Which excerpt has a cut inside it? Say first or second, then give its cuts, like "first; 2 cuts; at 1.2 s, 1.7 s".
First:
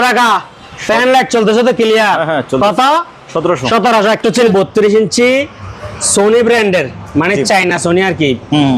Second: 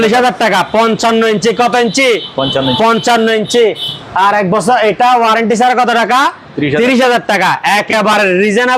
first; 1 cut; at 4.5 s